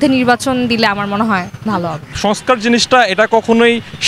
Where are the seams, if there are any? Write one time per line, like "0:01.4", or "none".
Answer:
0:02.2